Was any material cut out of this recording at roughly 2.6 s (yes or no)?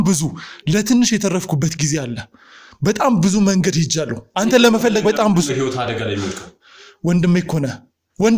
no